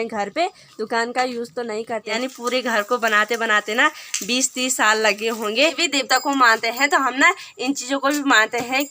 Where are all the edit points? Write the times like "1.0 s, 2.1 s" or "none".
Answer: 2.2 s, 5.8 s